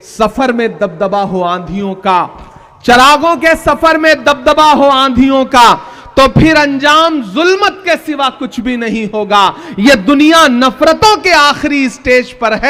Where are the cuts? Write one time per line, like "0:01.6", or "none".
none